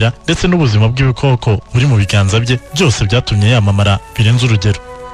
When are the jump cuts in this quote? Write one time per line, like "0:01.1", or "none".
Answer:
none